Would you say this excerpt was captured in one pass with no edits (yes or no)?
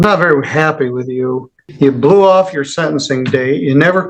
no